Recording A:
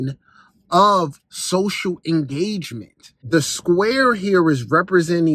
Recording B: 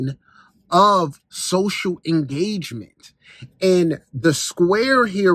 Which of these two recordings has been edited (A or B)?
A